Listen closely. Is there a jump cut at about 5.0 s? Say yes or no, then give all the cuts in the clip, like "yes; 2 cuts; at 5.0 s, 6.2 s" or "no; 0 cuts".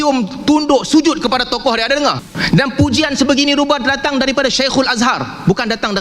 no; 1 cut; at 2.3 s